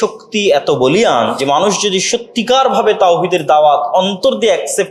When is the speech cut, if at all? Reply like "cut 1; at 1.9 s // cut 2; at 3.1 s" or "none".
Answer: cut 1; at 1.4 s